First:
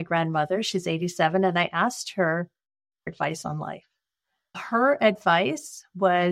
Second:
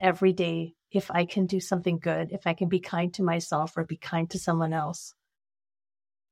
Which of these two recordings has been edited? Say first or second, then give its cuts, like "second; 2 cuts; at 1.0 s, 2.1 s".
first; 2 cuts; at 3.1 s, 4.6 s